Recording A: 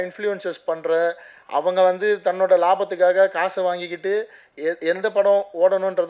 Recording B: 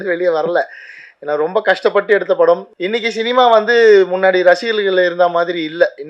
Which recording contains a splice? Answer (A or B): B